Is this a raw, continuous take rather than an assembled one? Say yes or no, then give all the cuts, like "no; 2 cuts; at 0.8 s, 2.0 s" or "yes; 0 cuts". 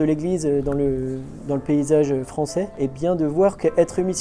no; 1 cut; at 2.7 s